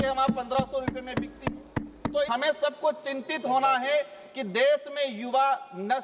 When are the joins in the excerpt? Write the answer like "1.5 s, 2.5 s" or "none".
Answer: 2.3 s